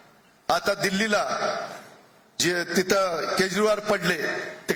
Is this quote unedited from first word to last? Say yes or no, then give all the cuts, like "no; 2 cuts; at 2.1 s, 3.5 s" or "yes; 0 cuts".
yes; 0 cuts